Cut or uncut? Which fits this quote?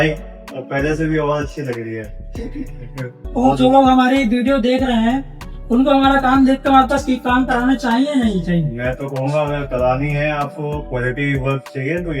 cut